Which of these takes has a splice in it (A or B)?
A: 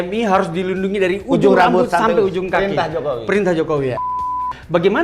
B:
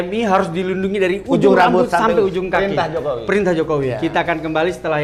A